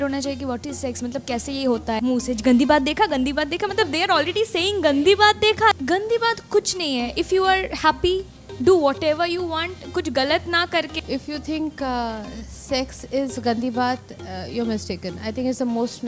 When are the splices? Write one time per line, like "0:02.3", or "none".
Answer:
0:02.0
0:05.8
0:10.9